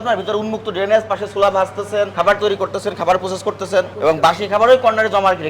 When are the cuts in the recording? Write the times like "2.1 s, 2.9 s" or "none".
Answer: 2.1 s, 3.9 s